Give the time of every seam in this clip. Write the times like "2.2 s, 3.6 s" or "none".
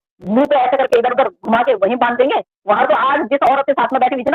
2.8 s